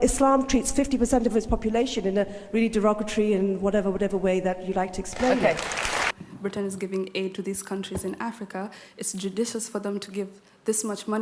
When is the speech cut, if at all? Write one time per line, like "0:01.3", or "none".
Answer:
0:06.0